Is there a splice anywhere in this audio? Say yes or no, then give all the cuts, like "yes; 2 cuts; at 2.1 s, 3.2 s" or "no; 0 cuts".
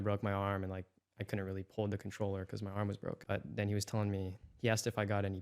yes; 1 cut; at 3.2 s